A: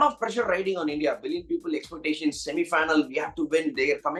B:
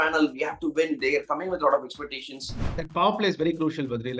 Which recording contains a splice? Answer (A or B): B